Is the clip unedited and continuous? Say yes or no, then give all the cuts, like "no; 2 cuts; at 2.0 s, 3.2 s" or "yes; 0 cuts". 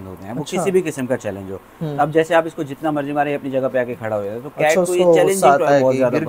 yes; 0 cuts